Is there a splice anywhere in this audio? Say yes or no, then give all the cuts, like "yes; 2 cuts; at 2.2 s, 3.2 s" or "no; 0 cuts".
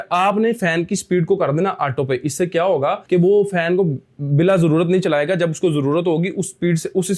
no; 0 cuts